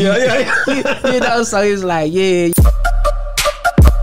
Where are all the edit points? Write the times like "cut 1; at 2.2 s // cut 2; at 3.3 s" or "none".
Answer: cut 1; at 2.5 s